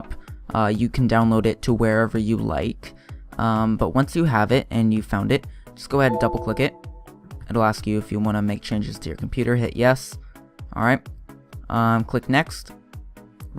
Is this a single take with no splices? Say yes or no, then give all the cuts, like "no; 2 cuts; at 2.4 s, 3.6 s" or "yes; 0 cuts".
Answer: no; 1 cut; at 5.0 s